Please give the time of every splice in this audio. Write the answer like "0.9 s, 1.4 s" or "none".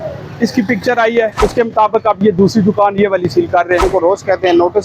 1.3 s, 3.9 s

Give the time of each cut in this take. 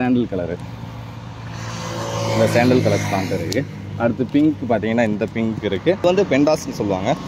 6.0 s

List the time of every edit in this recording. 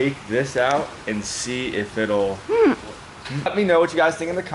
3.4 s

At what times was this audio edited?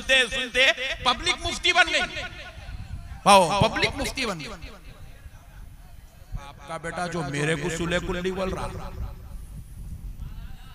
6.7 s

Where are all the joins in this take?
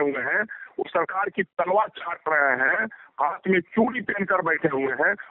none

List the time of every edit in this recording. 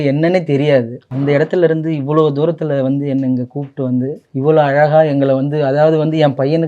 1.0 s, 4.2 s

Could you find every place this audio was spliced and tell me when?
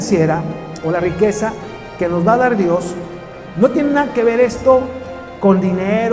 none

